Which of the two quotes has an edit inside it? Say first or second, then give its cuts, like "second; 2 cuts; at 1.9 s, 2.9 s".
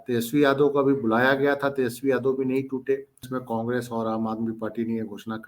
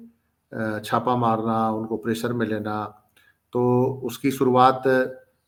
first; 1 cut; at 3.3 s